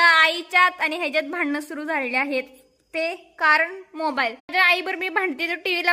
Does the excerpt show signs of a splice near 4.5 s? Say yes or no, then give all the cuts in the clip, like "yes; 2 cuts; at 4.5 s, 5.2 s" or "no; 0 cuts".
yes; 1 cut; at 4.5 s